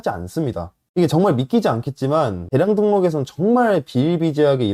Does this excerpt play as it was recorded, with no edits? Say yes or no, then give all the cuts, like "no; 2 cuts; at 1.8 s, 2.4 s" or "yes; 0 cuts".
yes; 0 cuts